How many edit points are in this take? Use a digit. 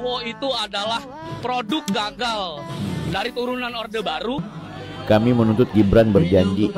1